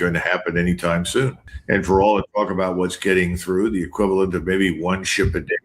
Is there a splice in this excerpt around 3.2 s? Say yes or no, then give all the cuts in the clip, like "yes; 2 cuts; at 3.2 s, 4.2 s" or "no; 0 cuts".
no; 1 cut; at 1.5 s